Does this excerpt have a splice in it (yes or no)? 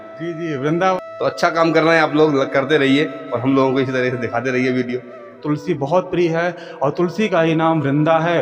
yes